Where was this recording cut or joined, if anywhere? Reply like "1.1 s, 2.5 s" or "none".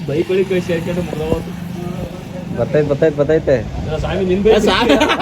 none